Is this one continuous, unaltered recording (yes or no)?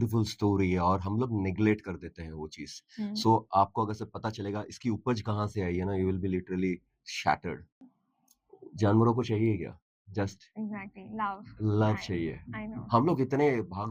no